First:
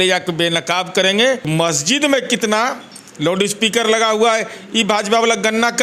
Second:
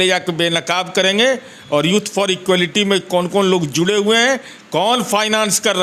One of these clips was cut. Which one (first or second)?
first